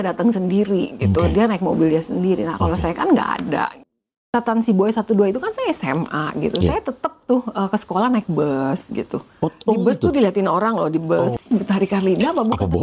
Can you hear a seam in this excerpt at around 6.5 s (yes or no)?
no